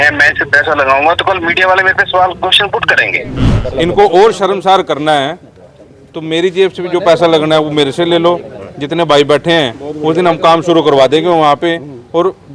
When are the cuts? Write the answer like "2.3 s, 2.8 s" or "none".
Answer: 3.3 s